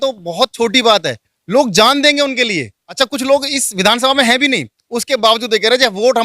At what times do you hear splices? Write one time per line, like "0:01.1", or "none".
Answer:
0:02.8